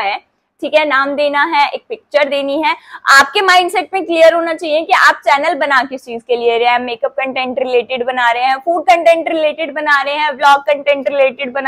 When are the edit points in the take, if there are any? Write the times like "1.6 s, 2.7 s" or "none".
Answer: none